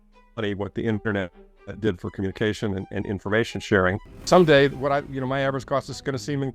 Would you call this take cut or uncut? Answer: cut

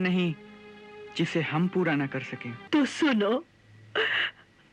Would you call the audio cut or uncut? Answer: cut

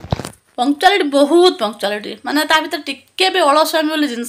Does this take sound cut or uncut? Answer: uncut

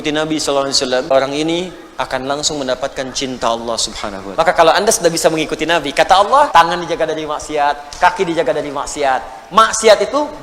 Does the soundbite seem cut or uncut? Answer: cut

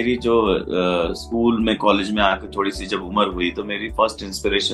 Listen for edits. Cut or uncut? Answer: uncut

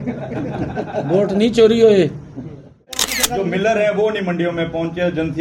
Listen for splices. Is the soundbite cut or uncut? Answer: cut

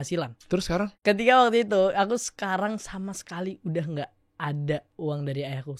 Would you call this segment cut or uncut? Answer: cut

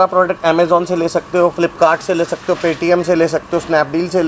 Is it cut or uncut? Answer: uncut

